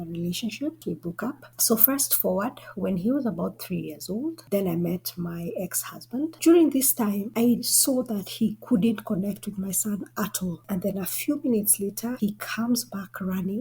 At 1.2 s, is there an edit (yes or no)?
yes